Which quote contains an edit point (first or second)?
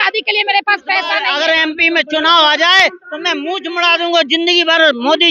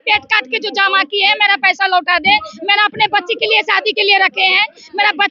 first